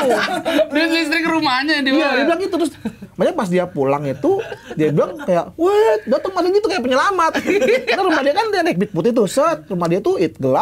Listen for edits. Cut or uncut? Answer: uncut